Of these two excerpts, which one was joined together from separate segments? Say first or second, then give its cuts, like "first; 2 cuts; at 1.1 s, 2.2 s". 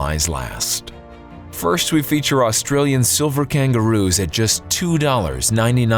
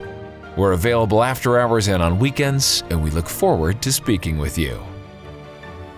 second; 1 cut; at 4.8 s